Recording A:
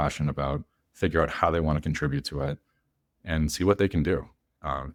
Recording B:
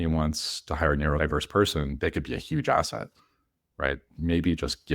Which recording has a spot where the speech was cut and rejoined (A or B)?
B